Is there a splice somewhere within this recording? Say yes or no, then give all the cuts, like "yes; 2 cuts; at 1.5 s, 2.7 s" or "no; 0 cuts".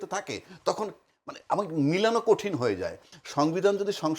yes; 1 cut; at 3.0 s